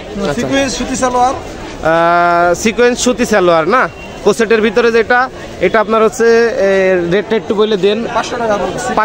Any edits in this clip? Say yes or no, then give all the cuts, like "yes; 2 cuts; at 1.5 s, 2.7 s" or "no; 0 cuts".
no; 0 cuts